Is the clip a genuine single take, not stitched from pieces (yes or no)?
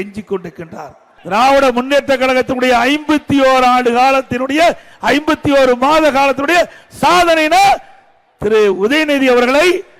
no